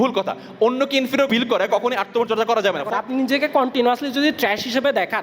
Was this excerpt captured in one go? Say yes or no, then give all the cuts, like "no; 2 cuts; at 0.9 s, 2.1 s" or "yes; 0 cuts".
no; 2 cuts; at 1.3 s, 3.0 s